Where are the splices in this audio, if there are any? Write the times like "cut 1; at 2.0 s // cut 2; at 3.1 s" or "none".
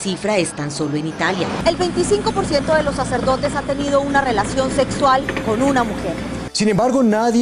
cut 1; at 1.6 s // cut 2; at 6.4 s